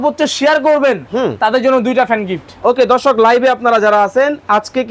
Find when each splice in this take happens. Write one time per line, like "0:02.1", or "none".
none